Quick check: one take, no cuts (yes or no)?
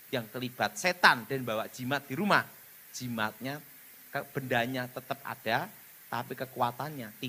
yes